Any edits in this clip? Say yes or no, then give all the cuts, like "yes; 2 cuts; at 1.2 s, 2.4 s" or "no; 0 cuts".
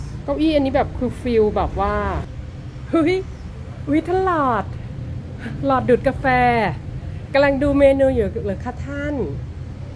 yes; 1 cut; at 2.4 s